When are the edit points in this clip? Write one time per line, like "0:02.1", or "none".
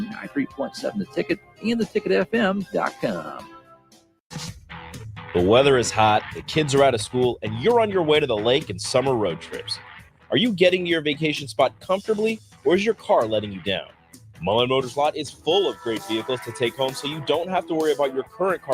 0:04.0